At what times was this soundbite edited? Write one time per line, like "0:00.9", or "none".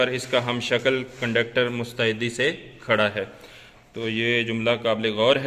none